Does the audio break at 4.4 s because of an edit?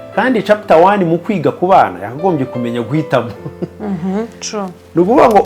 no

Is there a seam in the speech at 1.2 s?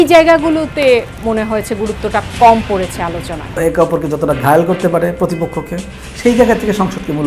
no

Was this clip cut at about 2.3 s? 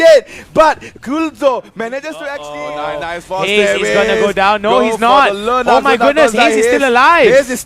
yes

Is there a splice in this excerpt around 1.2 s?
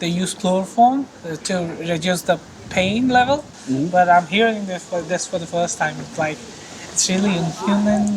yes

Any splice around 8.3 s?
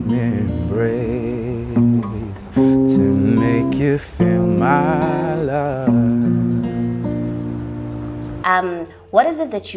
yes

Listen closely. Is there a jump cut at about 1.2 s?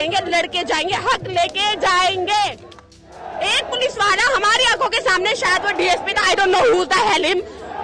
no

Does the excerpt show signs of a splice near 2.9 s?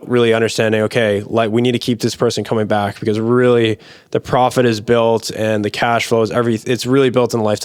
no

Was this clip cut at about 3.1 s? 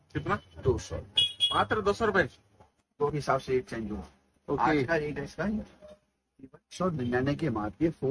yes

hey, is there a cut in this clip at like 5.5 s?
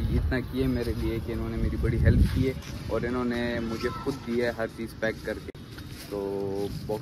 no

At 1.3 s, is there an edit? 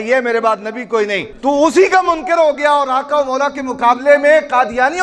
yes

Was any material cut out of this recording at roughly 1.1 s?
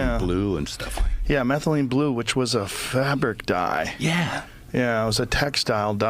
yes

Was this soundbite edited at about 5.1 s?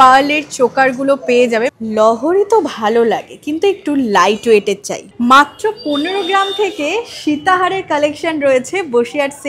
yes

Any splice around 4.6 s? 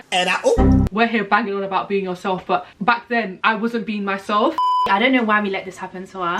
yes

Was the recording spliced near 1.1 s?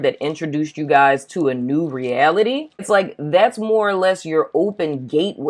no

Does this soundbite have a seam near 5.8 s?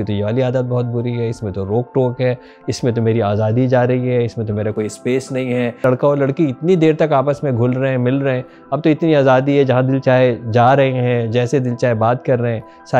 yes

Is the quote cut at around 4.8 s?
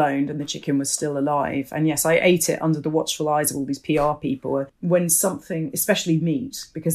yes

